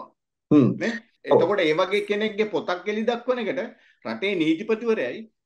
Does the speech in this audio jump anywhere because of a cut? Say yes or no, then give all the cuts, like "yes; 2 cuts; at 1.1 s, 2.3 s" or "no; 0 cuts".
yes; 1 cut; at 1.1 s